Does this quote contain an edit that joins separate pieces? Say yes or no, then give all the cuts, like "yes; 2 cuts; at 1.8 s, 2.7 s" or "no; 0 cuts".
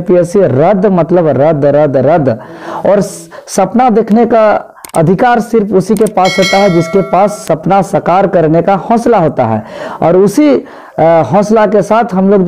no; 0 cuts